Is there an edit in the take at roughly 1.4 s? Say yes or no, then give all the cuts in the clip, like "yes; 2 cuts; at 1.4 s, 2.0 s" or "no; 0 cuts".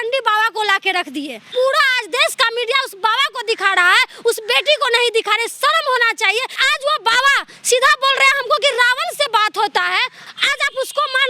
yes; 3 cuts; at 1.4 s, 6.6 s, 10.2 s